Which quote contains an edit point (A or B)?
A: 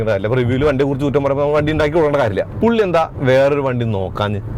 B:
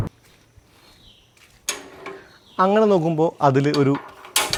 A